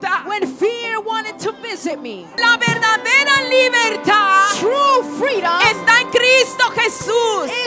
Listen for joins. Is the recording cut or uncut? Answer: cut